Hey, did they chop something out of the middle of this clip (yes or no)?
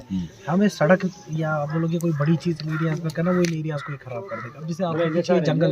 no